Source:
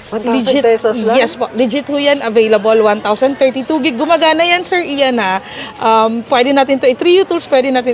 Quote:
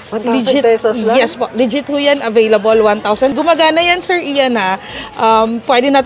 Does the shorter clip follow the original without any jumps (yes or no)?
no